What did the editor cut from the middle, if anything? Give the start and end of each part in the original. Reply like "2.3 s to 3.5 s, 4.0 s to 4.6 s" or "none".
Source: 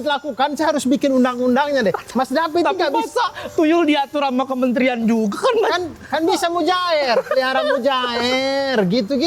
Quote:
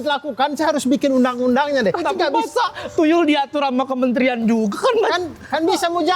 2.0 s to 2.6 s